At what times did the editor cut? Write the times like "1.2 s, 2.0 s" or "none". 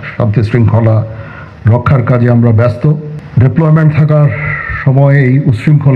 3.2 s